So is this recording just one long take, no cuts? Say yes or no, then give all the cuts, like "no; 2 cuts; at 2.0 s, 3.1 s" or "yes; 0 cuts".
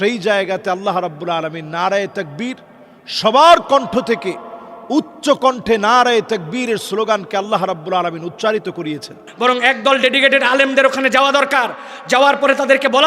no; 1 cut; at 9.2 s